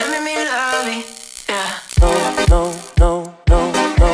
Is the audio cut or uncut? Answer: uncut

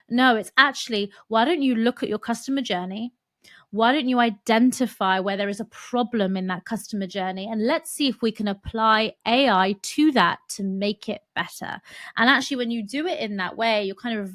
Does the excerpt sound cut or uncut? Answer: uncut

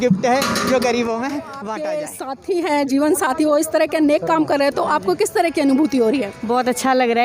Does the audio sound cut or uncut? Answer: cut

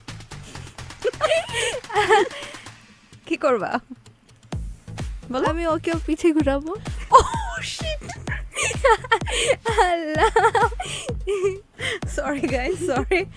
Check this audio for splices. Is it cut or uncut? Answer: uncut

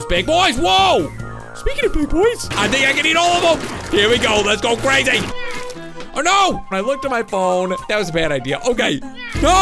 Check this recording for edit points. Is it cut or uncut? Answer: cut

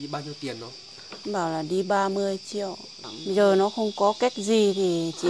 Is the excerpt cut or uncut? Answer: cut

